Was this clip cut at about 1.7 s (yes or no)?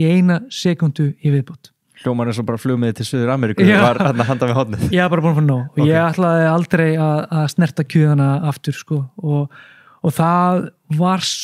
no